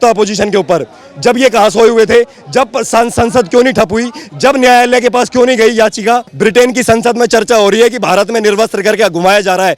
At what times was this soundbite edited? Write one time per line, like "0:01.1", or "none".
0:06.3